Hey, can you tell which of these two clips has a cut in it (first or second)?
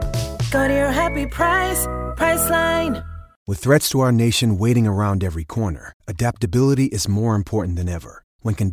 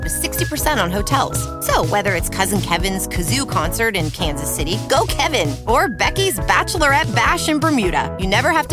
first